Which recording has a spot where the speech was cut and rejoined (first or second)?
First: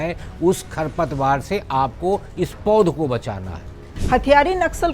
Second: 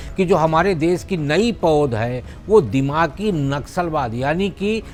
first